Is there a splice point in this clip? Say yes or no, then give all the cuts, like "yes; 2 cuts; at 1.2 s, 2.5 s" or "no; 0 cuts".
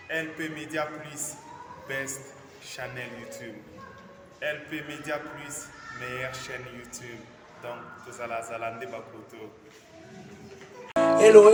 no; 0 cuts